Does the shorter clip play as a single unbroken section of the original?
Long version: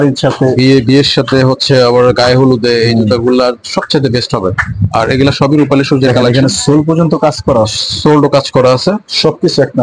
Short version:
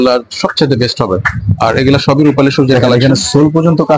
yes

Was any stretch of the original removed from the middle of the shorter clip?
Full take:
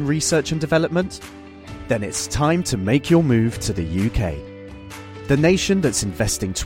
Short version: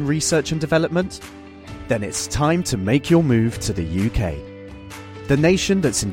no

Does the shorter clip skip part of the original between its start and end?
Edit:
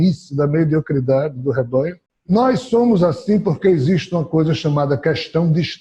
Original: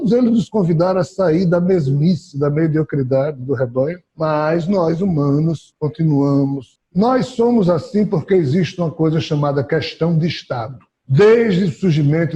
yes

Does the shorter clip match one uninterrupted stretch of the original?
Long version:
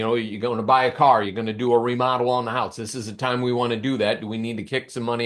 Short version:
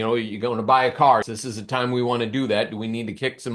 no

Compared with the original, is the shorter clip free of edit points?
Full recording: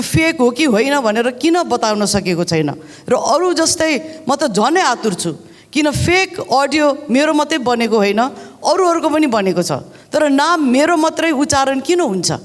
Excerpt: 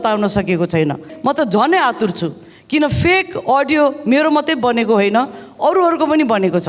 no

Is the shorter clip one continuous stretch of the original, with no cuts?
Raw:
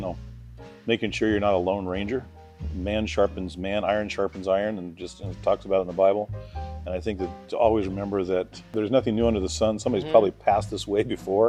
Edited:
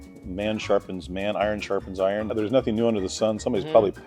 no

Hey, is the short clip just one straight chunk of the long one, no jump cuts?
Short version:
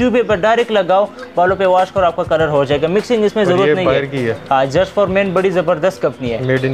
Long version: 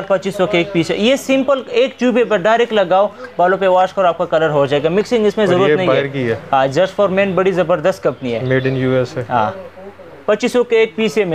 yes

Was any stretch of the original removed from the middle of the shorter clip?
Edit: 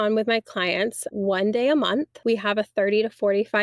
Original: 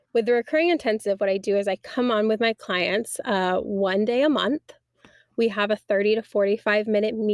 yes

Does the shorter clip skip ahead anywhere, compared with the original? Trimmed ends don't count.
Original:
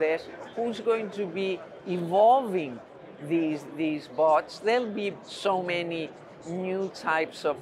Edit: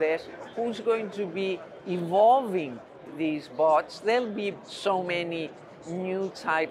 yes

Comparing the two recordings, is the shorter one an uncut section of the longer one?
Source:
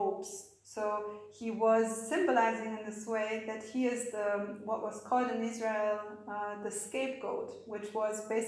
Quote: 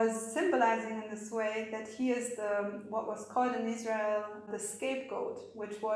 no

